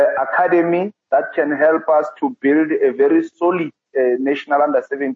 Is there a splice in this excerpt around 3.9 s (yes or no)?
yes